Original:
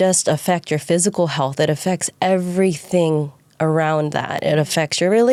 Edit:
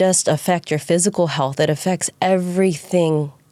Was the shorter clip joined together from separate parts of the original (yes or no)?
no